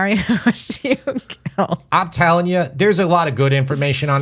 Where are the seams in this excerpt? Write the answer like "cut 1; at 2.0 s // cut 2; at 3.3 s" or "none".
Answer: cut 1; at 1.8 s